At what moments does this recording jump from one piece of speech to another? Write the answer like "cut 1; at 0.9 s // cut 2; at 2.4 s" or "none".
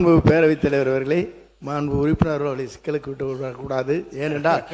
none